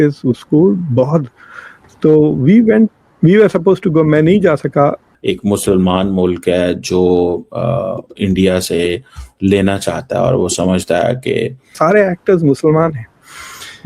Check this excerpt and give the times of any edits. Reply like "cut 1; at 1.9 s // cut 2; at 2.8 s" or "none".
cut 1; at 5.1 s // cut 2; at 11.8 s